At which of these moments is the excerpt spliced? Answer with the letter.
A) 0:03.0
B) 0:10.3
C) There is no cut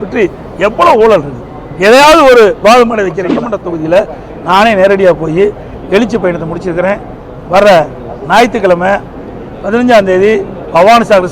A